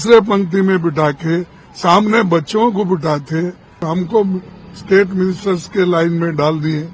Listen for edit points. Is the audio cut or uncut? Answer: cut